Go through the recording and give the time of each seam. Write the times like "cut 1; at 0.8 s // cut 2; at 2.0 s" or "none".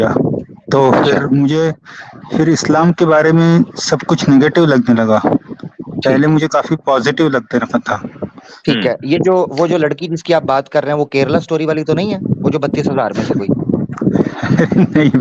none